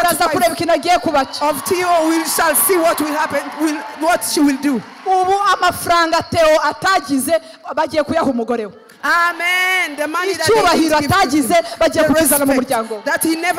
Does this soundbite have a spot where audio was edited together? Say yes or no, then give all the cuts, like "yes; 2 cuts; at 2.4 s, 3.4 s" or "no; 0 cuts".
no; 0 cuts